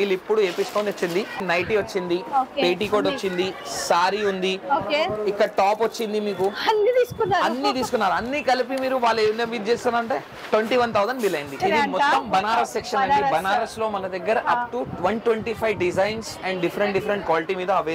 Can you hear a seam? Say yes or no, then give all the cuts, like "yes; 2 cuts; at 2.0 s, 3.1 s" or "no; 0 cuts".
yes; 2 cuts; at 1.4 s, 11.6 s